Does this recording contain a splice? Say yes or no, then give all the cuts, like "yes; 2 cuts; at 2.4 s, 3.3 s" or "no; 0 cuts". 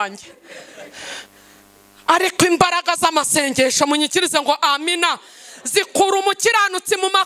no; 0 cuts